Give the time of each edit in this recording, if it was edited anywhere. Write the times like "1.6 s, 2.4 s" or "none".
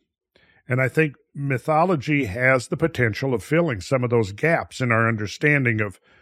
none